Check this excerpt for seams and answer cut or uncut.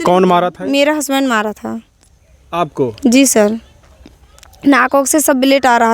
uncut